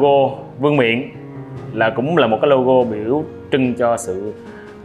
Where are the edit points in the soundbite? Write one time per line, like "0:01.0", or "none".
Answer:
none